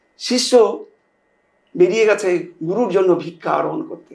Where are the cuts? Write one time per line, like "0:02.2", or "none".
none